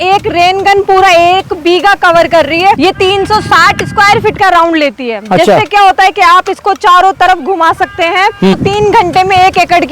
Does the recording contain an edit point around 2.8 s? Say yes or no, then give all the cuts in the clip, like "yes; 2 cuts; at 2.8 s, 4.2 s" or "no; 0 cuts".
yes; 2 cuts; at 2.8 s, 8.6 s